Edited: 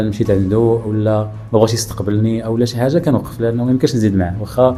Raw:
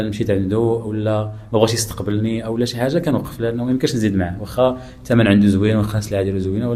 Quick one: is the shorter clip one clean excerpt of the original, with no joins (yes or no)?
yes